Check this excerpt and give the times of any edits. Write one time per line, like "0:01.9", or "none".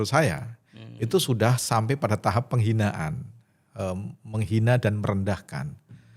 none